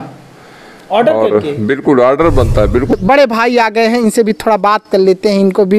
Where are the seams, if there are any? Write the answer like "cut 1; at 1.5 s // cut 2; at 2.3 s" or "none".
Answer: cut 1; at 2.9 s